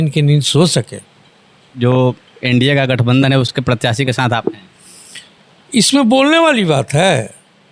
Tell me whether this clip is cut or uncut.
cut